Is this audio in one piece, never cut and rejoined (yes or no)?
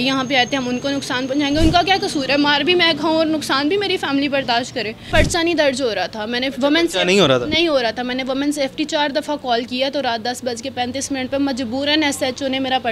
no